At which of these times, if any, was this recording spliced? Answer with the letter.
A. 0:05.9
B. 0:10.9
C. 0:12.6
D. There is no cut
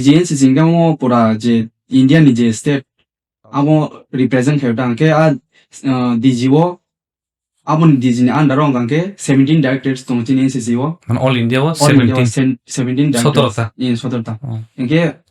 D